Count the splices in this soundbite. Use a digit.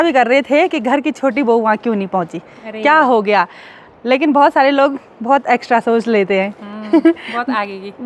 0